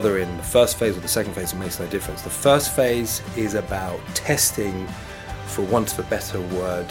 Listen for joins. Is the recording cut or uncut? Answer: uncut